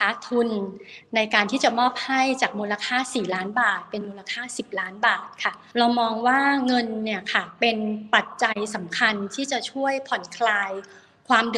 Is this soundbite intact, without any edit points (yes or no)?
no